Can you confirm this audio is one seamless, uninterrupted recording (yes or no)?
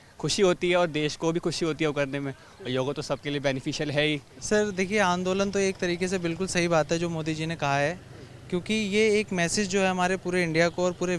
yes